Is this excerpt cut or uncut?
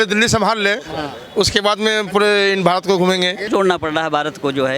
cut